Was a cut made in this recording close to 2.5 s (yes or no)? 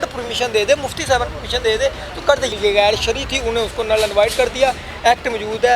yes